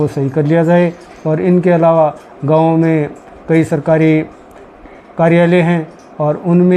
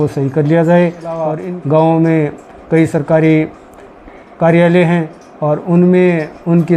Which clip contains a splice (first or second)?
second